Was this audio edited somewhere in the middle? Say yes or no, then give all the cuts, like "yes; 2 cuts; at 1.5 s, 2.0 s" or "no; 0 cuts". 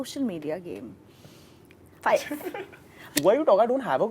yes; 1 cut; at 3.0 s